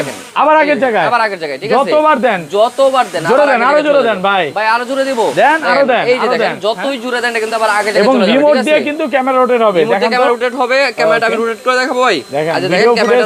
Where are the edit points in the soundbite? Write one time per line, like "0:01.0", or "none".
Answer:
none